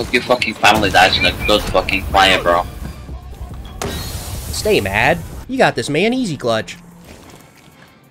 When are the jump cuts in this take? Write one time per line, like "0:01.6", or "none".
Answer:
none